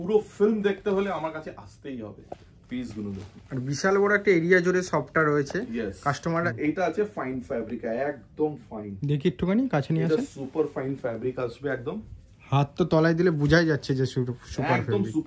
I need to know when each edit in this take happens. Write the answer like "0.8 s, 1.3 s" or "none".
6.5 s